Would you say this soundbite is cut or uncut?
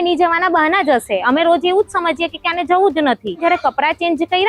cut